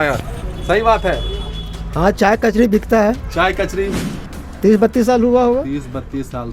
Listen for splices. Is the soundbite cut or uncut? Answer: cut